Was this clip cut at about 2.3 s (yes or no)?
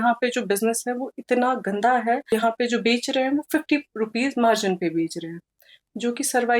yes